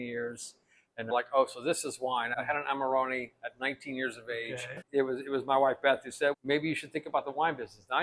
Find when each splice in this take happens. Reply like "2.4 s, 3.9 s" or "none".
1.1 s, 2.3 s, 4.9 s